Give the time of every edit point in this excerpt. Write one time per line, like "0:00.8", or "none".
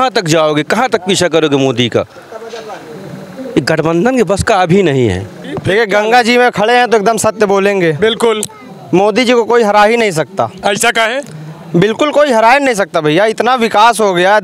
0:05.6